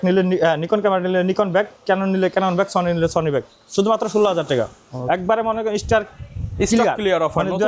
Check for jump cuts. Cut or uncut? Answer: uncut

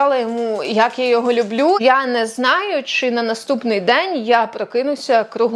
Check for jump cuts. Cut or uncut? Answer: cut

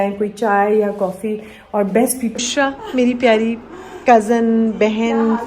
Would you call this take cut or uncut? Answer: cut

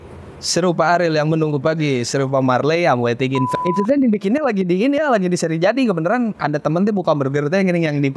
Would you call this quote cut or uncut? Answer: cut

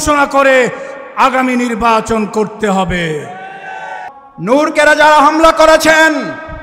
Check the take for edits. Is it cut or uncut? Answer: cut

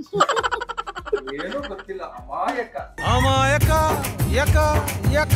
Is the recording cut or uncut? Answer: uncut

